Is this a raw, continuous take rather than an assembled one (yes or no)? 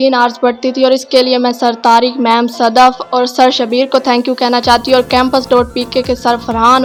yes